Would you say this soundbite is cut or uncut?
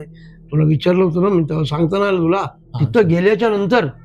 cut